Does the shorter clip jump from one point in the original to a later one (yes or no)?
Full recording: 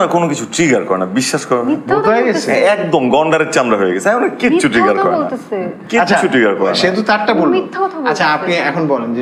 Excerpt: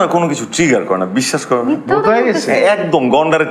no